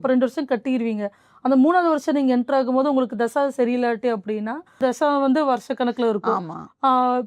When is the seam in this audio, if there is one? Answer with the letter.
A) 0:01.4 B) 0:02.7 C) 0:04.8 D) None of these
C